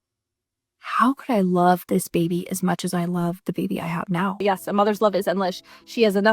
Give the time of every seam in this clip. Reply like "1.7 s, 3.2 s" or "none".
4.4 s